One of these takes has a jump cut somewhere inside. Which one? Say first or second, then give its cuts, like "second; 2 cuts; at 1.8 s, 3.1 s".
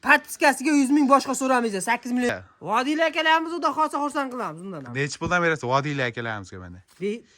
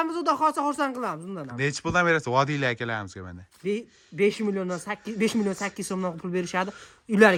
first; 1 cut; at 2.3 s